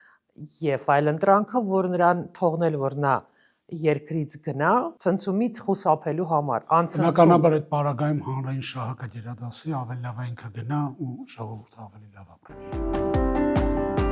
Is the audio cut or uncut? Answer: cut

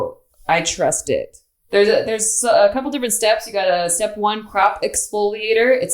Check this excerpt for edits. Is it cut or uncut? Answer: cut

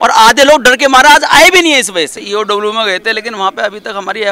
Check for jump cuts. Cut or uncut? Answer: cut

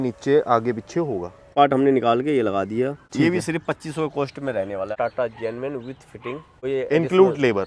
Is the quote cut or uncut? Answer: cut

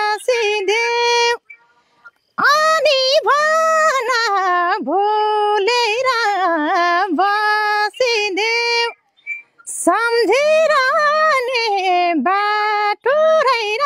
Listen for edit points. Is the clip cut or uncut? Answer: uncut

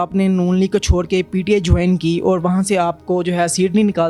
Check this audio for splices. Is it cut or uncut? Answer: uncut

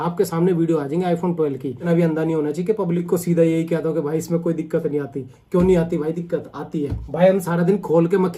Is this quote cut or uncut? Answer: uncut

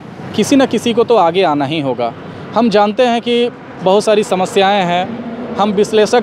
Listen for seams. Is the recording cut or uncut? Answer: uncut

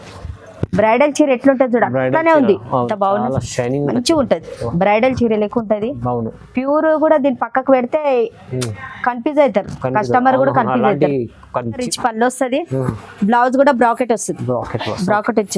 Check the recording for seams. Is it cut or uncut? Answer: cut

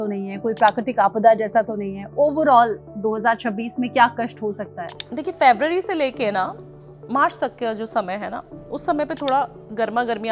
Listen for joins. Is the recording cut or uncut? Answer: uncut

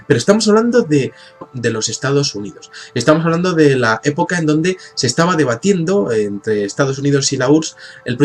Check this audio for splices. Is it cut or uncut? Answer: uncut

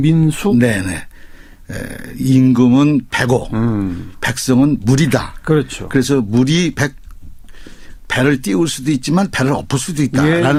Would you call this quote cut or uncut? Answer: uncut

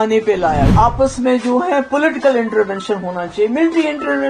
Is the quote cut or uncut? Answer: cut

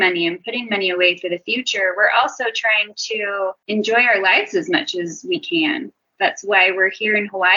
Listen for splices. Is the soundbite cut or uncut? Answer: uncut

